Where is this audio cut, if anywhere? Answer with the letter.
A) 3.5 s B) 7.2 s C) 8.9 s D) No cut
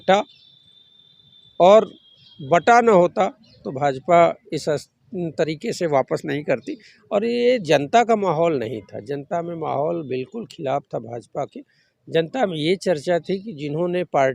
D